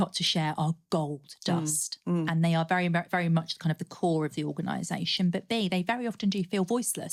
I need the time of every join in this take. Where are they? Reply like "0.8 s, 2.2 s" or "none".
none